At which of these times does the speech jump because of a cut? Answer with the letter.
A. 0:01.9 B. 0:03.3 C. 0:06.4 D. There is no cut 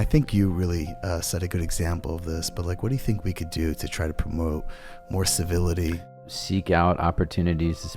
C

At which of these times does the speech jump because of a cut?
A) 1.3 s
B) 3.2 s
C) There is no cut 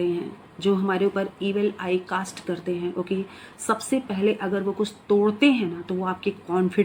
C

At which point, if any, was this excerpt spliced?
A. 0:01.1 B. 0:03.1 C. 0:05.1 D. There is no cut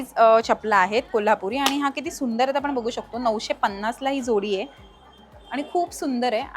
D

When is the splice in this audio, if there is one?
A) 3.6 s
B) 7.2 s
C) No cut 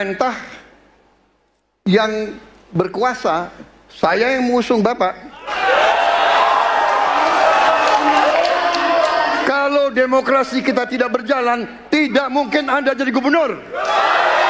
B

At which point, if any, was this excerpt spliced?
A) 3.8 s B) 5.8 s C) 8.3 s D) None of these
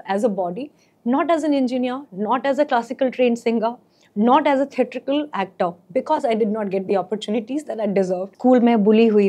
C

